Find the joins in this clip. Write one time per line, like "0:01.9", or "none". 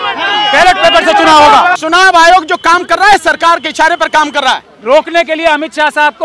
0:01.8
0:04.7